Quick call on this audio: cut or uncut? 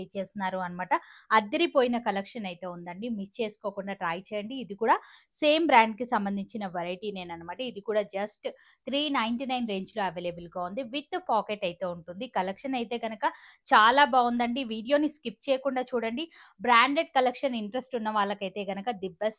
uncut